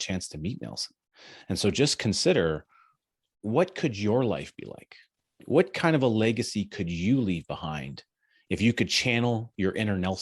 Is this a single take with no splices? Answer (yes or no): no